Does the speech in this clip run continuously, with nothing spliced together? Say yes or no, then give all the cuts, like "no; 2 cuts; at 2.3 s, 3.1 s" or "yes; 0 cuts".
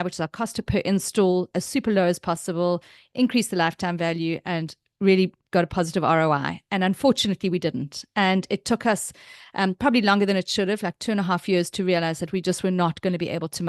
yes; 0 cuts